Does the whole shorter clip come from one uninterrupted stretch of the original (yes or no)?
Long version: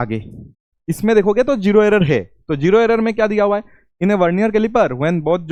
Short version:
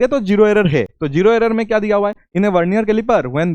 no